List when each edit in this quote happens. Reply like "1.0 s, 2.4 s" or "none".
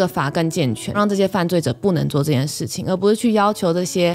0.9 s